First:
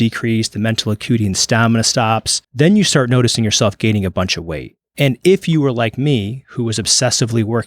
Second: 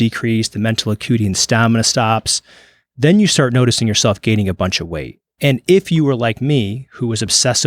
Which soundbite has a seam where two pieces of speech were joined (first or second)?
first